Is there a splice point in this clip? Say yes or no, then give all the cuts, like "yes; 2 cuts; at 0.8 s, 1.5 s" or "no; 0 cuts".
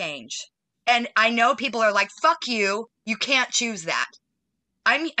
no; 0 cuts